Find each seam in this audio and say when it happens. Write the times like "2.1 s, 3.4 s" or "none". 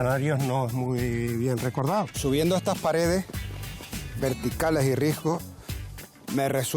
2.1 s